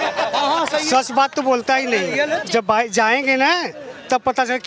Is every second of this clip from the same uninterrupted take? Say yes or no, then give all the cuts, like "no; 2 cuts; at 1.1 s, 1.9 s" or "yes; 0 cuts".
no; 1 cut; at 2.4 s